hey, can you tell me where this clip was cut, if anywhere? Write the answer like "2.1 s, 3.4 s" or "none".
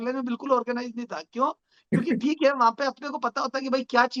none